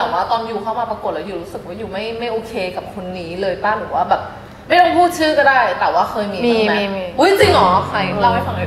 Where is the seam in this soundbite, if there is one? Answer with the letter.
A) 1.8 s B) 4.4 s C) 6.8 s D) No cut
D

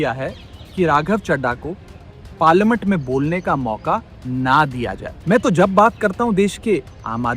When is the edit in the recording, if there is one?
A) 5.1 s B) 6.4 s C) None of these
A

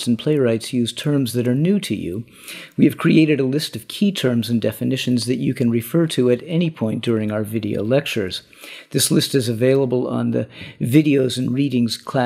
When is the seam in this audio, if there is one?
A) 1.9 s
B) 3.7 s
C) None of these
A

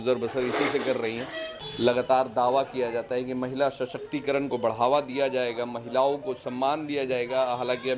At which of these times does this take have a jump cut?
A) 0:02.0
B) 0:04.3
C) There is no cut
A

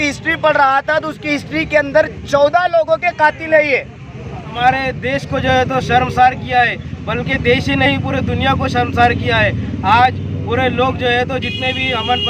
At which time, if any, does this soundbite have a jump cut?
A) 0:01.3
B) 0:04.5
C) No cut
B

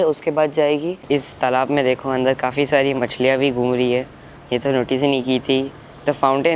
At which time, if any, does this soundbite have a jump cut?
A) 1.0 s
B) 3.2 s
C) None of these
A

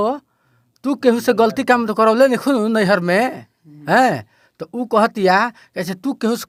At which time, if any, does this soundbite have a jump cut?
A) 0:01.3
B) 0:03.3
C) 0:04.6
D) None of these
D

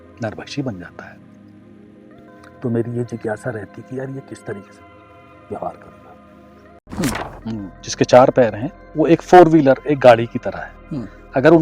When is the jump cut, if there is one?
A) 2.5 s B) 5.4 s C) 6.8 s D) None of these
C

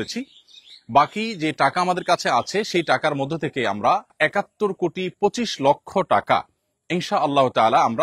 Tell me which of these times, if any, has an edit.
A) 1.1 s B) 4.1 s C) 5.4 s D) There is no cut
B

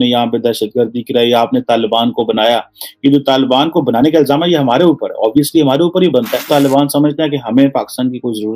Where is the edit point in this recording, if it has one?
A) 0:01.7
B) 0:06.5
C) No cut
B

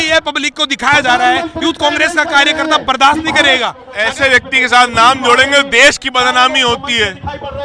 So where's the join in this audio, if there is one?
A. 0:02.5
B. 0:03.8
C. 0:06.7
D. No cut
B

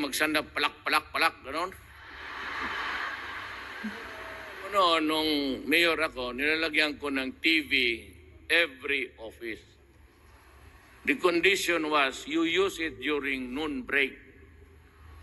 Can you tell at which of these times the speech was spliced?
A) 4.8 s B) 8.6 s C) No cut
A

